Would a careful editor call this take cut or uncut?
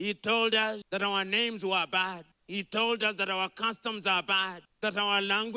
cut